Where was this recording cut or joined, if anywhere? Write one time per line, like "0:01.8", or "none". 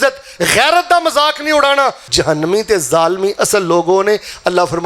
0:02.0

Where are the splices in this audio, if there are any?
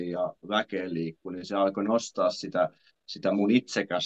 none

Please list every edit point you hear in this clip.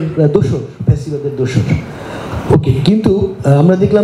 none

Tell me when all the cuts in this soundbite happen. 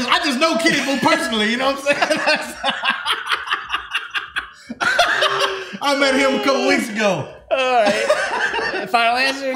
none

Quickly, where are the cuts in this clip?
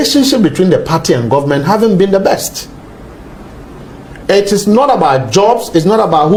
none

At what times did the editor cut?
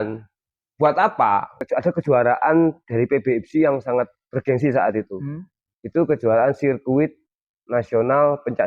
0:01.5

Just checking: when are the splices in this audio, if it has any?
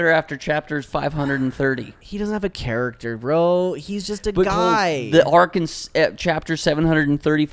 0:02.0

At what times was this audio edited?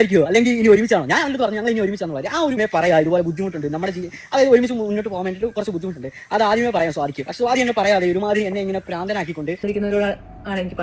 0:02.6
0:09.6

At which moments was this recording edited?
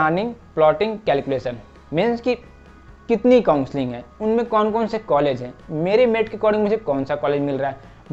none

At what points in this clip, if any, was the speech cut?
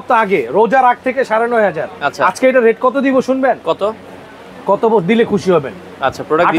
none

